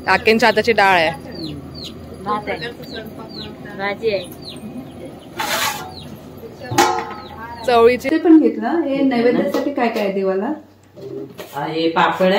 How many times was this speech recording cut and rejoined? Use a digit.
1